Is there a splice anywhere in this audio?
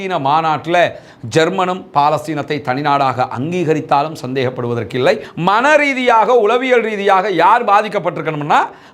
yes; 1 cut; at 5.3 s

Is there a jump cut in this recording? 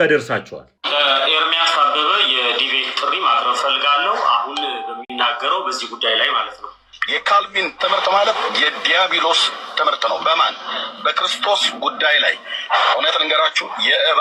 no; 0 cuts

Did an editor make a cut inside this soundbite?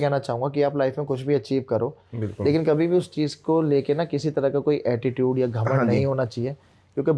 no; 0 cuts

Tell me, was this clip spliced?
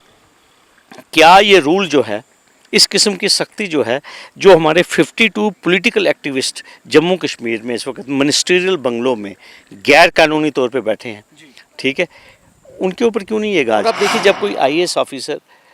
yes; 1 cut; at 13.8 s

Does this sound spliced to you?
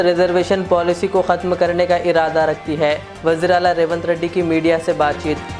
no; 0 cuts

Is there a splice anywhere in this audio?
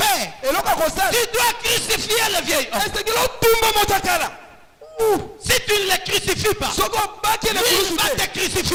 no; 0 cuts

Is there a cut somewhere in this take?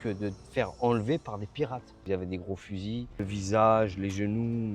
yes; 2 cuts; at 2.0 s, 3.2 s

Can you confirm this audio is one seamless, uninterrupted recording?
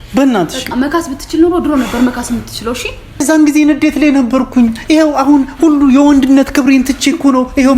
no; 1 cut; at 3.2 s

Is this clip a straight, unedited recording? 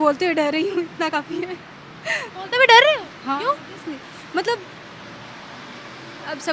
yes; 0 cuts

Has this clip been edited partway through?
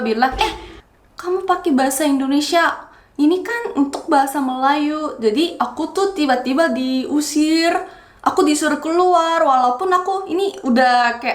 no; 0 cuts

